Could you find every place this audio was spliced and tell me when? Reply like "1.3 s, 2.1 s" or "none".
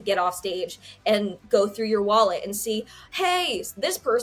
none